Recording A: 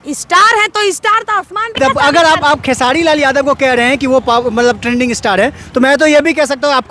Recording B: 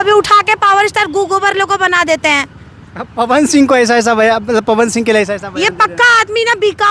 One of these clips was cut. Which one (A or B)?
A